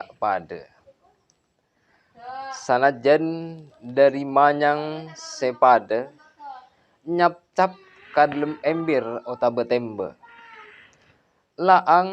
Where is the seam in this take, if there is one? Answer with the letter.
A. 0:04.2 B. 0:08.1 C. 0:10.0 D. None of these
D